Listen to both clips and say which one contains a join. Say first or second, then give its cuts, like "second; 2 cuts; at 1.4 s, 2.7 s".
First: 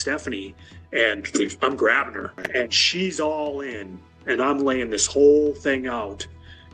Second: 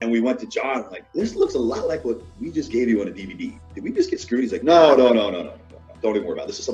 second; 1 cut; at 1.0 s